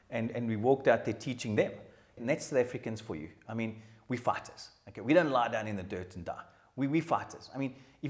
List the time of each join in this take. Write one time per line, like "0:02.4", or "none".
0:02.2